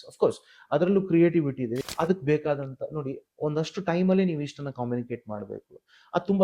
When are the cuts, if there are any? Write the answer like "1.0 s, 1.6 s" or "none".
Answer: 1.9 s